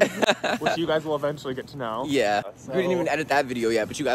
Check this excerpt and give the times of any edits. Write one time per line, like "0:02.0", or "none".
0:02.5